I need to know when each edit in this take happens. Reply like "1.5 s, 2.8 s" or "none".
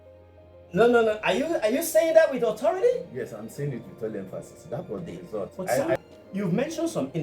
6.0 s